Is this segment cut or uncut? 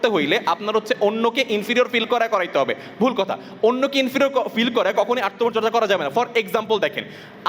uncut